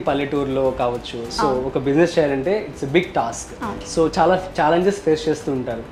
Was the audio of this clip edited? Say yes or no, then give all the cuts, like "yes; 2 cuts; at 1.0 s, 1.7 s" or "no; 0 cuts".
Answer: no; 0 cuts